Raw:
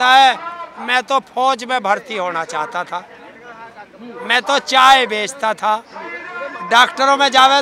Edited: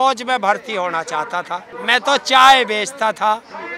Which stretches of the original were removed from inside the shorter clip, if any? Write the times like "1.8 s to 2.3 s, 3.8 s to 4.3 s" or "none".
3.1 s to 4.1 s